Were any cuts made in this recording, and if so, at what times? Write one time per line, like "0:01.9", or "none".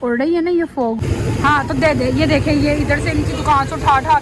0:01.0